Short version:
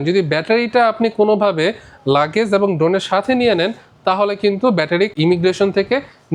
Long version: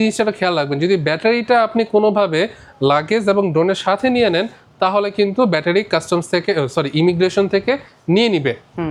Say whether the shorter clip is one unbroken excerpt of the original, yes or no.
no